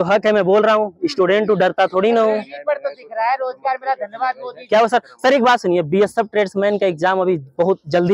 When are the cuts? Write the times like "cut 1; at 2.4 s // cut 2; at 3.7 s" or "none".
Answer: none